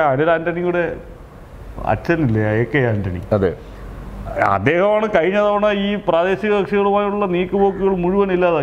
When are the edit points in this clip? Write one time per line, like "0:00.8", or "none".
none